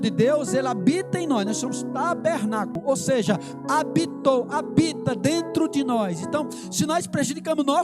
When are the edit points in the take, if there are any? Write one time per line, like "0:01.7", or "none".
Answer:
0:02.8